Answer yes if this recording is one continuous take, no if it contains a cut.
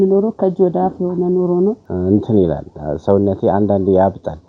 no